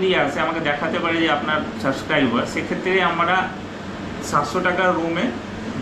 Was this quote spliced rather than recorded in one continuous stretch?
no; 0 cuts

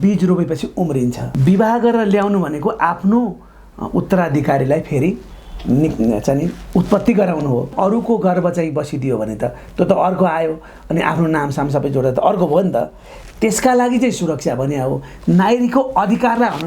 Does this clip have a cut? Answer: yes; 2 cuts; at 1.3 s, 7.7 s

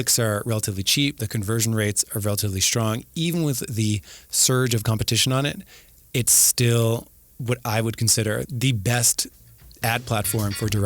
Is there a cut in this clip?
yes; 1 cut; at 8.5 s

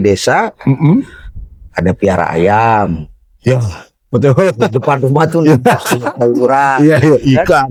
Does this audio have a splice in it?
no; 0 cuts

